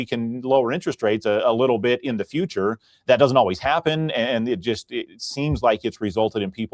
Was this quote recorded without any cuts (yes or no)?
no